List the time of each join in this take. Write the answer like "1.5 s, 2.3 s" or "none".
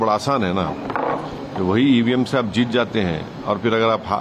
none